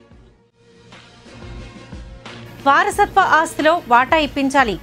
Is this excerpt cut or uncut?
uncut